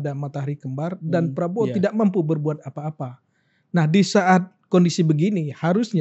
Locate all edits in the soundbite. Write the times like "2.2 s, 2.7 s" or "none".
none